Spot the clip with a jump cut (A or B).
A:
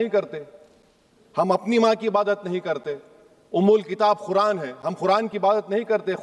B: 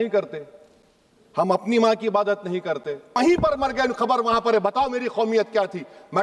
B